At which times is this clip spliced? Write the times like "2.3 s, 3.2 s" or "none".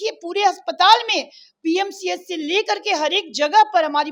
none